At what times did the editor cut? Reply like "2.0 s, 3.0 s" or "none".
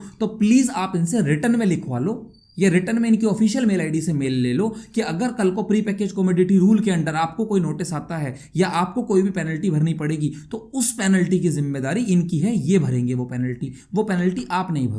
none

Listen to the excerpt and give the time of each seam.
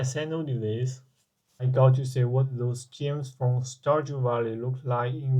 1.7 s

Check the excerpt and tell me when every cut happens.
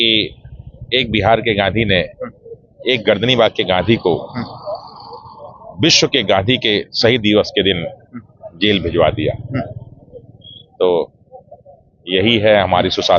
none

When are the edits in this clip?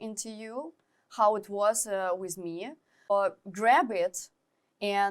3.1 s

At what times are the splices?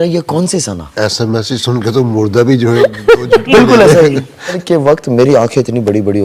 4.6 s

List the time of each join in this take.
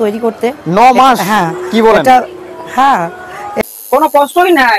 3.5 s

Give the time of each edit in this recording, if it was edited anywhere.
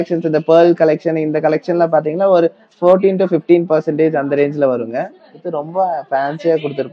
5.4 s

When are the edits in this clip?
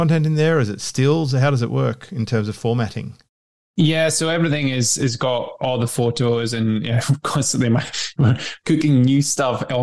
none

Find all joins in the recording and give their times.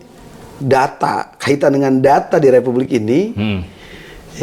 none

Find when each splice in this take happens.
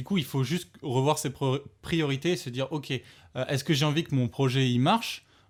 none

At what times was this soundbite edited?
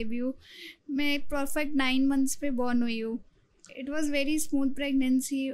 none

